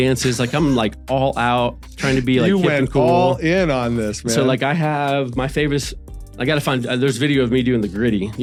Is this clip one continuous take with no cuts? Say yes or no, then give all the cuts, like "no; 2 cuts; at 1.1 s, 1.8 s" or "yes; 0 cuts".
yes; 0 cuts